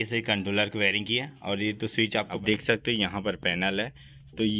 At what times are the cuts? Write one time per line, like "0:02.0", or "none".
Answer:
0:02.4